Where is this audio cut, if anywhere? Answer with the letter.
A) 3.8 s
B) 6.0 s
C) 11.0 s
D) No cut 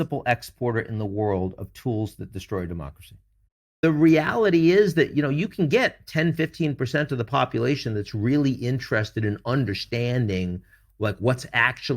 A